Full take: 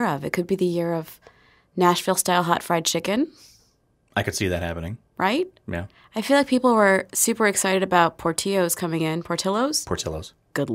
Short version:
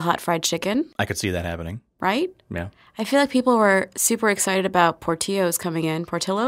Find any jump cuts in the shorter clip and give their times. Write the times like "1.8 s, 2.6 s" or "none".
0.9 s